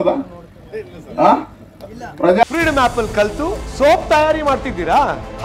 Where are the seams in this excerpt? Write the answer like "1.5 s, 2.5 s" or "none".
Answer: 2.4 s

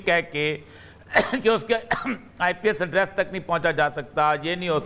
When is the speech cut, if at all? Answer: none

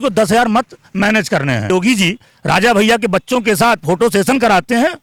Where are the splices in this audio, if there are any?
1.7 s

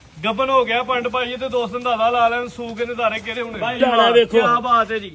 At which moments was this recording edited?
3.8 s

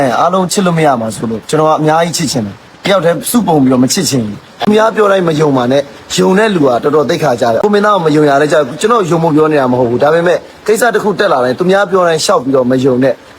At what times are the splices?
4.4 s, 7.6 s

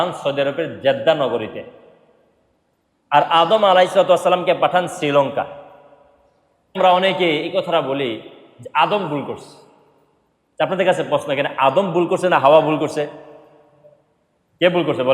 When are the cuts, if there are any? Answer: 6.8 s

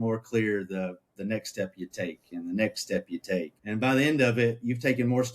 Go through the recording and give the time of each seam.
3.6 s

